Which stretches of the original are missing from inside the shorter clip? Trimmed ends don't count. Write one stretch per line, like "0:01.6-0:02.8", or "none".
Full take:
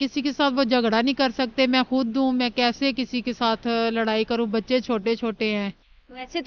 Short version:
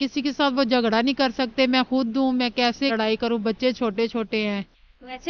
0:02.9-0:04.0